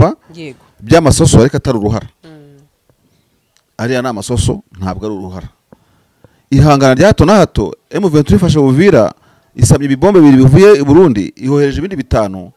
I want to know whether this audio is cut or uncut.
uncut